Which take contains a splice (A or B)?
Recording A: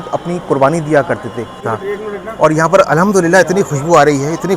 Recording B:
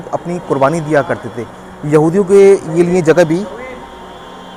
A